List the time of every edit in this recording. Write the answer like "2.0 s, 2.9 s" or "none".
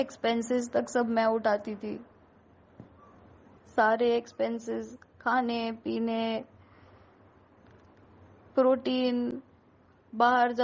none

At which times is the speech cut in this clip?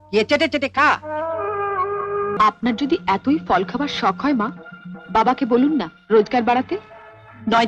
2.3 s

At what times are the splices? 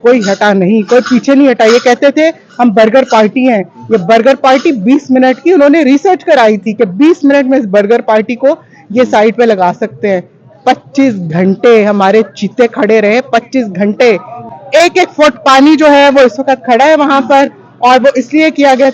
14.4 s

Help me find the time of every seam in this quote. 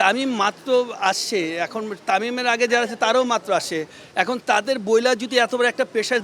none

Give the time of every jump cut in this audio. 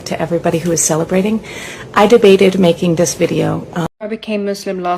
3.9 s

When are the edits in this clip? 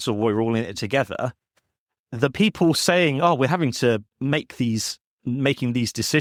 none

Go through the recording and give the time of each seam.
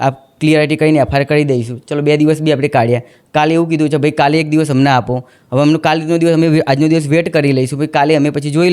none

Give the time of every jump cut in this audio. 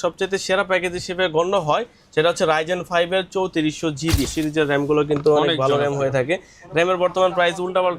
4.3 s

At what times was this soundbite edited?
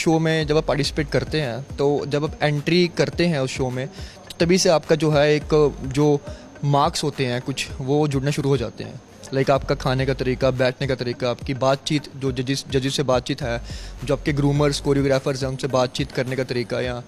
none

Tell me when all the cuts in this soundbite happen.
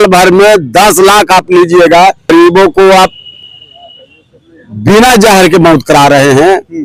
none

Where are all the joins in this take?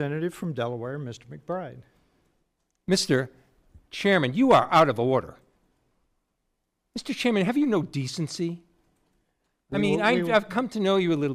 none

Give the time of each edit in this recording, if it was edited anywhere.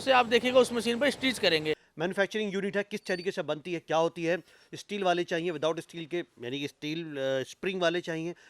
1.9 s

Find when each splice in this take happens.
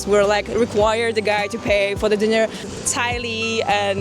2.7 s

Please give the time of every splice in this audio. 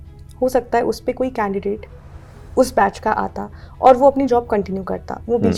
none

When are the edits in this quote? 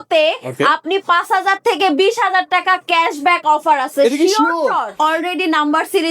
4.9 s

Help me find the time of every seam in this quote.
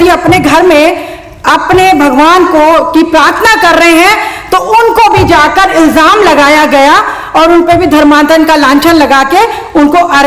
none

